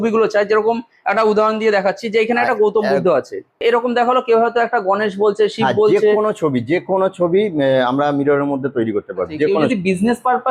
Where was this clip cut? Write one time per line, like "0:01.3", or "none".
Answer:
0:03.6
0:09.7